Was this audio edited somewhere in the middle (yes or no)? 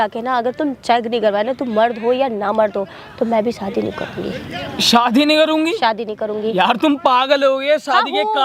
no